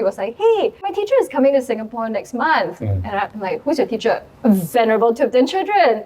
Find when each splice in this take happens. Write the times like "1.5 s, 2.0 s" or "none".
0.9 s, 4.3 s